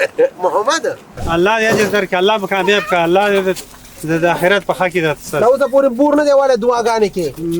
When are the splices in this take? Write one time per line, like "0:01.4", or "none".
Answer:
0:01.1